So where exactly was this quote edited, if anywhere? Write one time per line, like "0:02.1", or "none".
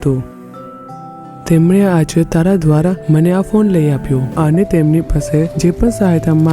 0:04.3

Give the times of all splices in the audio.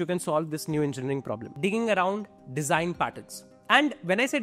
0:01.4
0:02.4

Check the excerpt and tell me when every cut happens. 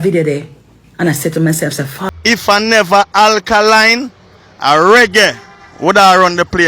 0:01.9

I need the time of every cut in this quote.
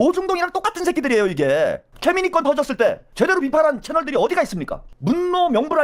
0:01.9
0:04.9

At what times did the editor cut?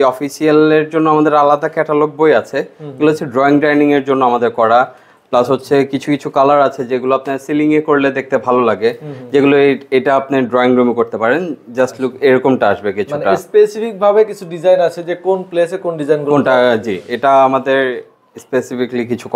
none

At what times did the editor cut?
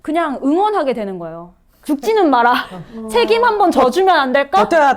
none

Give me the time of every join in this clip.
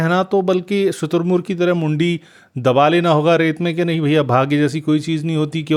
none

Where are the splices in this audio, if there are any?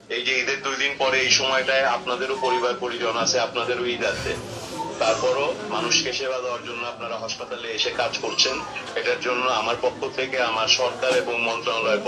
none

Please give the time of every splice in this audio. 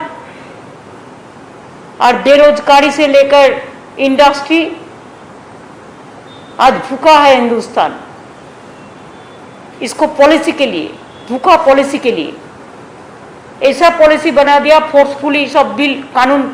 none

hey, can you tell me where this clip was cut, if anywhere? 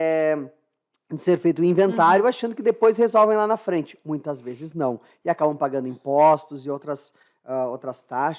none

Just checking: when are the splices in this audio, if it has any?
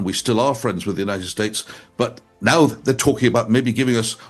none

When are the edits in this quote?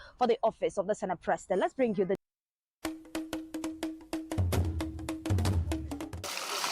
0:02.2

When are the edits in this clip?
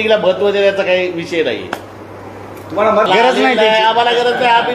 0:03.1

